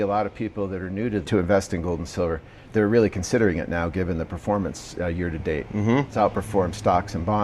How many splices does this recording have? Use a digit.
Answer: 1